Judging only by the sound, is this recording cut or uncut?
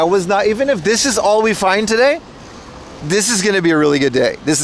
uncut